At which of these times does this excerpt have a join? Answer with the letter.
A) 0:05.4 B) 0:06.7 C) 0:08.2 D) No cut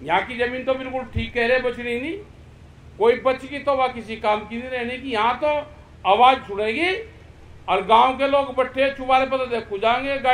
D